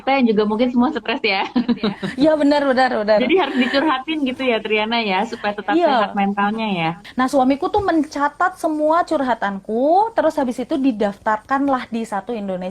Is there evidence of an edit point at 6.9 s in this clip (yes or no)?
yes